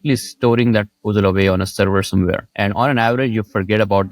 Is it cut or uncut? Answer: cut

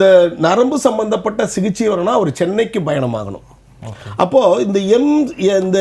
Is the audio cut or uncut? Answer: uncut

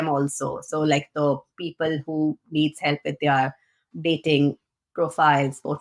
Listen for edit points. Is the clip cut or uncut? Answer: uncut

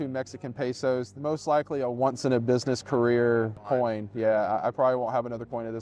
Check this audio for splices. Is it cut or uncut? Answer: cut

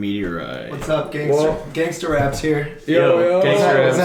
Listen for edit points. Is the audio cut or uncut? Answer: uncut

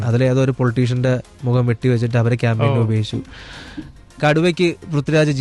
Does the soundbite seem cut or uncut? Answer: uncut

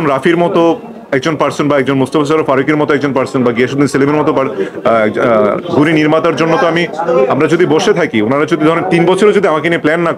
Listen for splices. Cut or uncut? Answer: uncut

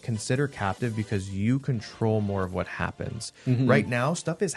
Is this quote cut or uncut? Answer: uncut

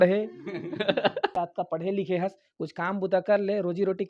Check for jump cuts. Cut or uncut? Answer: cut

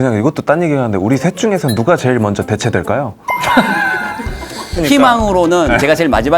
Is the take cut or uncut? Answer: cut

